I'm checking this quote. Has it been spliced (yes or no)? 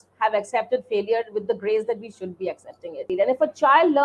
yes